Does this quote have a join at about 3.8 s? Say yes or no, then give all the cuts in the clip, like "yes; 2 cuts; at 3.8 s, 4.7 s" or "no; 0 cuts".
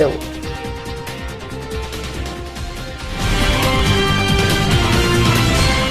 yes; 2 cuts; at 2.4 s, 3.8 s